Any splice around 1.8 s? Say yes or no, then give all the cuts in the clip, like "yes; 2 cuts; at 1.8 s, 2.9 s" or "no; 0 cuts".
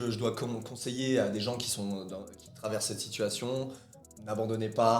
no; 1 cut; at 3.8 s